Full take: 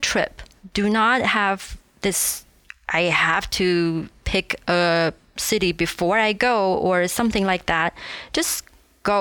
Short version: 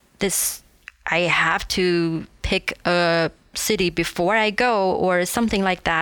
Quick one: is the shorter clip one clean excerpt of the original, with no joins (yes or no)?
yes